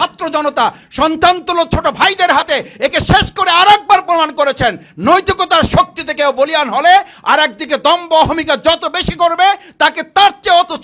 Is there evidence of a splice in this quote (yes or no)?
no